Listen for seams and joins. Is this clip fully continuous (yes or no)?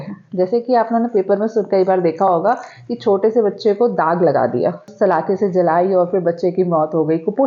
no